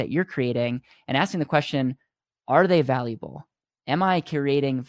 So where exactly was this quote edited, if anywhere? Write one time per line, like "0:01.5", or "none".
none